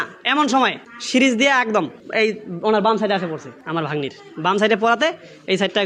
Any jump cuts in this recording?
no; 0 cuts

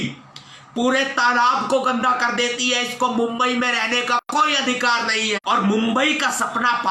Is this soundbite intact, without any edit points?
no; 1 cut; at 5.4 s

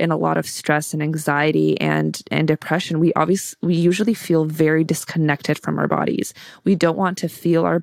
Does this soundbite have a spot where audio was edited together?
no; 0 cuts

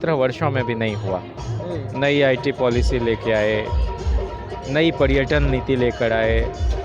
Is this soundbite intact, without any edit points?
yes; 0 cuts

